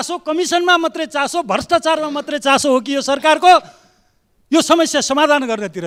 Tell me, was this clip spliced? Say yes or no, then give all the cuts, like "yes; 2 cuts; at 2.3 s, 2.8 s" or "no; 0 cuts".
no; 0 cuts